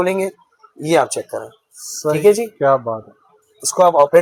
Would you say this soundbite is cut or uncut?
uncut